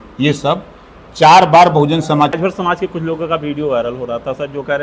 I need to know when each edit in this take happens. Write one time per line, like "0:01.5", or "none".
0:02.4